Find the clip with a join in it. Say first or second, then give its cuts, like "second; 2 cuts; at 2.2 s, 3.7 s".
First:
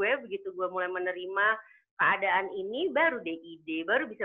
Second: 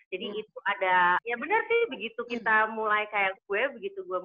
second; 1 cut; at 1.2 s